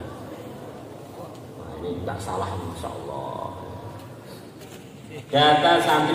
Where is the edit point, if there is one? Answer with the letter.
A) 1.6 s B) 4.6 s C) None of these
B